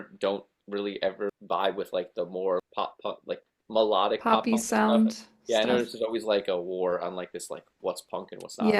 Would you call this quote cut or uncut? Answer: cut